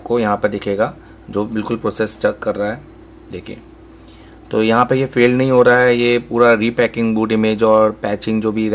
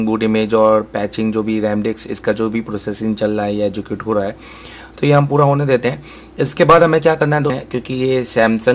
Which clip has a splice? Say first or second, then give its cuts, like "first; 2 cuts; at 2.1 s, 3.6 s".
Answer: second; 1 cut; at 7.6 s